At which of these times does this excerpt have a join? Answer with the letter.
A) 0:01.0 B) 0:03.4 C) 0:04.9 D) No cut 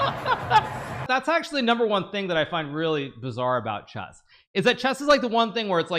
A